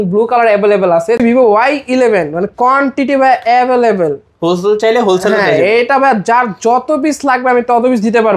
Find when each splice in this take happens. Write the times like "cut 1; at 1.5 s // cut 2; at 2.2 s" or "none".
cut 1; at 1.2 s